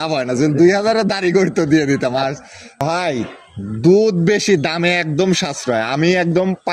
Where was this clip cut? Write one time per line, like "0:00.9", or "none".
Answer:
0:02.8